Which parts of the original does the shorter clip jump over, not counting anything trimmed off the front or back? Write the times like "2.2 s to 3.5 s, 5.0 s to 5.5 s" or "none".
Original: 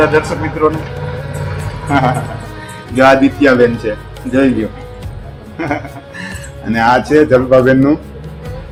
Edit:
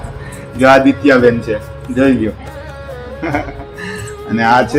none